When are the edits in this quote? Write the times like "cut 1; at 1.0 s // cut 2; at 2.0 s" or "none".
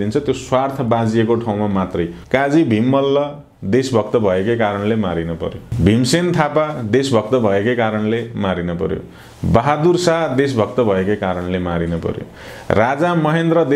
cut 1; at 2.2 s // cut 2; at 5.7 s